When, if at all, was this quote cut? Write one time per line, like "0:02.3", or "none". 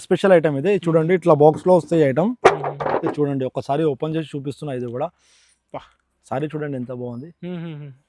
none